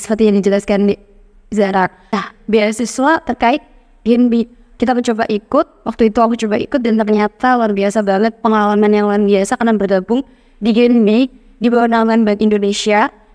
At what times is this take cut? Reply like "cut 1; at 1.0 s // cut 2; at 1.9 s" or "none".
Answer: cut 1; at 2.2 s